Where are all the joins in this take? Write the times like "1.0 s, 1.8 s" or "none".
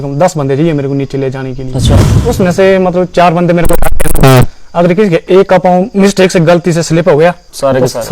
2.2 s